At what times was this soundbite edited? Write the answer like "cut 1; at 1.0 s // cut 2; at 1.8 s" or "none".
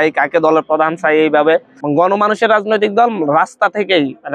cut 1; at 1.8 s

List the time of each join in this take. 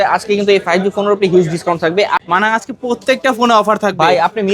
cut 1; at 2.2 s

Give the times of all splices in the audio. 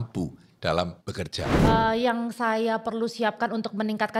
cut 1; at 1.4 s

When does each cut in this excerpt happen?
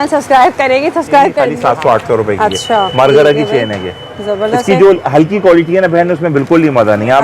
cut 1; at 1.5 s

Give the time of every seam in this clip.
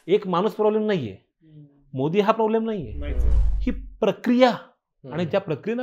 none

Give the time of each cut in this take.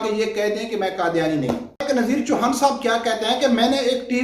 cut 1; at 1.8 s

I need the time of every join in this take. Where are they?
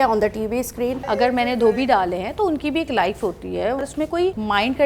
cut 1; at 1.0 s // cut 2; at 3.8 s

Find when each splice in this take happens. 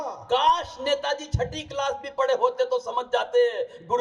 none

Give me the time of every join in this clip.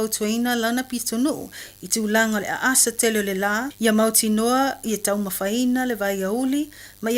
cut 1; at 2.8 s

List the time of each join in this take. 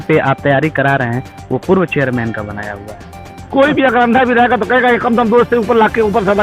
cut 1; at 3.5 s

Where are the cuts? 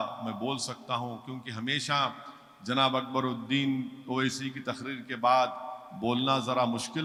none

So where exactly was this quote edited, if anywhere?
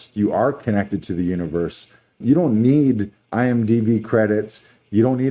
cut 1; at 2.2 s

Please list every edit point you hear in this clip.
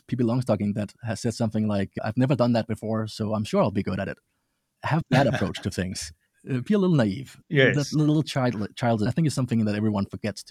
cut 1; at 1.0 s // cut 2; at 1.9 s // cut 3; at 4.8 s // cut 4; at 9.1 s

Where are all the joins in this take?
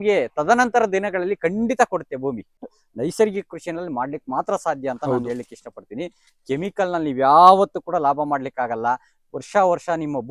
cut 1; at 2.6 s

